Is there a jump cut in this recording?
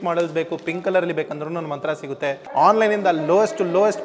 yes; 1 cut; at 2.4 s

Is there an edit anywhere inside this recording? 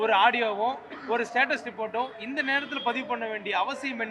no; 0 cuts

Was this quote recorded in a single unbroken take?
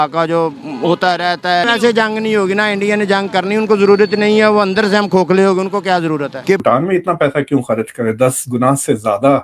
no; 2 cuts; at 1.6 s, 6.6 s

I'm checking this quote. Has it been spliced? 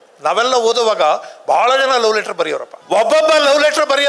yes; 1 cut; at 2.7 s

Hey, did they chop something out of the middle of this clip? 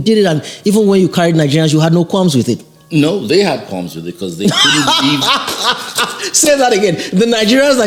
no; 0 cuts

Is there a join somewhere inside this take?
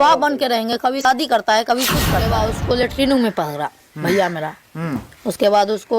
yes; 2 cuts; at 1.0 s, 2.3 s

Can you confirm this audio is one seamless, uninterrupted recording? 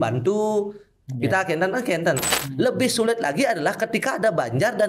no; 1 cut; at 2.2 s

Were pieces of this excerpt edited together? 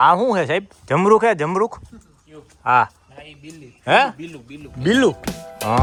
no; 0 cuts

